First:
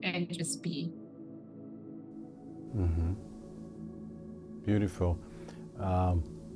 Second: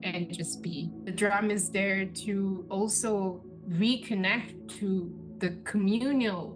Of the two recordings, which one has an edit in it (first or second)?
second